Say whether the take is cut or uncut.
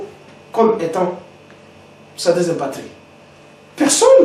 uncut